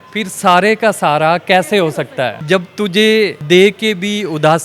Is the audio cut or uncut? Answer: cut